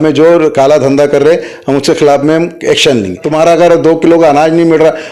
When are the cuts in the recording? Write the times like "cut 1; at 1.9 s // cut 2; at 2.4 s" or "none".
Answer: cut 1; at 3.2 s